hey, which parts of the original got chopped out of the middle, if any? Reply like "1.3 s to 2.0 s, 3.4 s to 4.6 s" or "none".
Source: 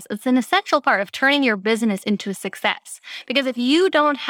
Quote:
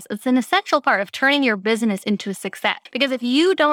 2.8 s to 3.2 s